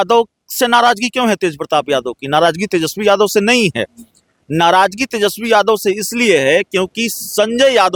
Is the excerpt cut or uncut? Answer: uncut